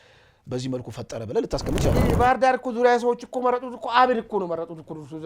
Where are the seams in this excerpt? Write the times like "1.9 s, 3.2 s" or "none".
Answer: 2.0 s